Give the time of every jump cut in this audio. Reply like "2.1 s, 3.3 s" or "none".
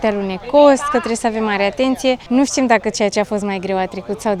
none

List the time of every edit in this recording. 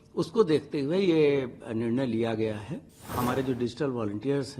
3.1 s

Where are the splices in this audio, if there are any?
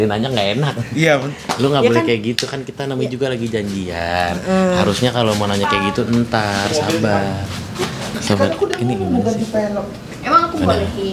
8.2 s

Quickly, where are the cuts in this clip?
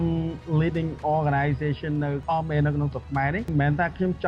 2.2 s, 3.5 s

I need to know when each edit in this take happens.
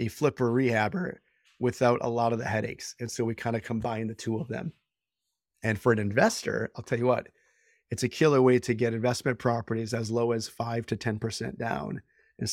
none

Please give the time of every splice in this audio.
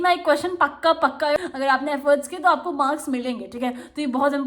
1.4 s

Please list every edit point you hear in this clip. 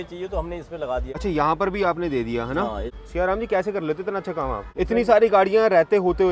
1.1 s, 2.9 s, 4.6 s

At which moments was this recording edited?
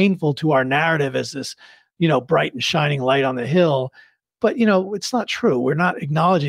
4.2 s

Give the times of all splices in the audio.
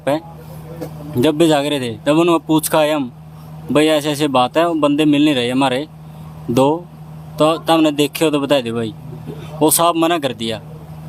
none

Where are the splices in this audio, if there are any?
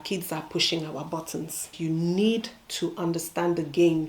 1.7 s

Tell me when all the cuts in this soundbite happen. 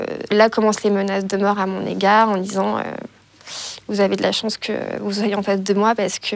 none

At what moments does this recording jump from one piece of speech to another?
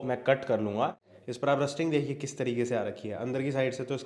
1.0 s

